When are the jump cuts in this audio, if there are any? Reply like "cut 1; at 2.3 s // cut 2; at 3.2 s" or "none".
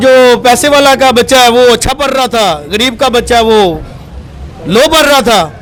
none